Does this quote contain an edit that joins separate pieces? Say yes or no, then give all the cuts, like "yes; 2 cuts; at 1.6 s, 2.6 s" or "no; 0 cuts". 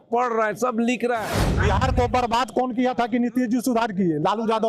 yes; 1 cut; at 1.5 s